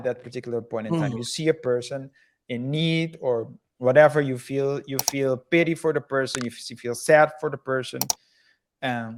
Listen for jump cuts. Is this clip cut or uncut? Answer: uncut